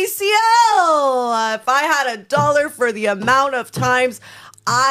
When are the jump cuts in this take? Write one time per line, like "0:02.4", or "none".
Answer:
0:01.5

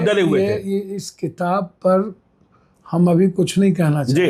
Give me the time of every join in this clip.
none

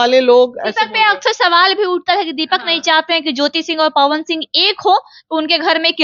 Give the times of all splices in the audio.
none

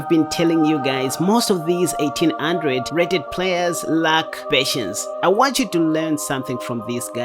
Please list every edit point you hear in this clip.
0:05.1

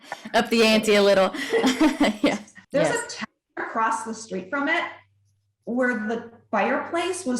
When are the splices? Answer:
0:02.5

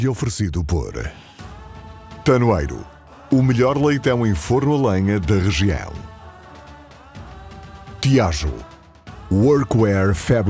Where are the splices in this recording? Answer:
0:08.0

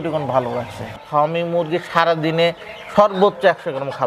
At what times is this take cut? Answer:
0:01.0

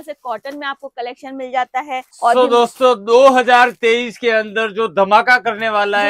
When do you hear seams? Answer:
0:02.1

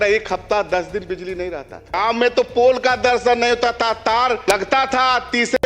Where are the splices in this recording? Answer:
0:02.0
0:04.4

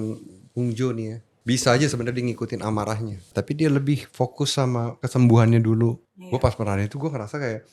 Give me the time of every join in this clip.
0:01.3
0:03.3
0:05.0
0:06.1

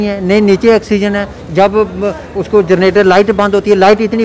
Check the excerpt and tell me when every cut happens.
none

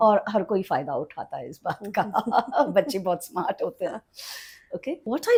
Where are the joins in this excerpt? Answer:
none

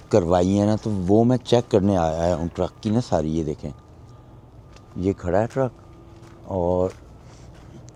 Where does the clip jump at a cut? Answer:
none

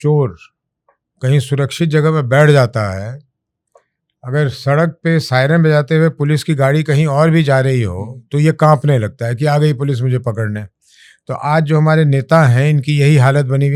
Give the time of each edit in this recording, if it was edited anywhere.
none

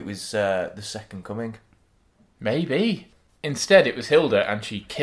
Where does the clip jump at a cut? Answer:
0:03.1

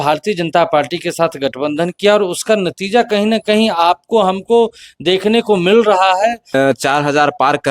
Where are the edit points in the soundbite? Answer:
0:06.5

